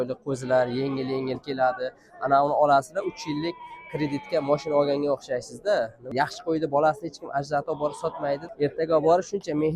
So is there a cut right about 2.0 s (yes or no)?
no